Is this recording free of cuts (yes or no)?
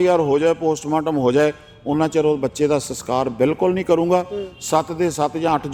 yes